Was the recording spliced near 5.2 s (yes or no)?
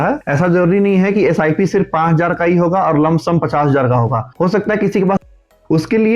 yes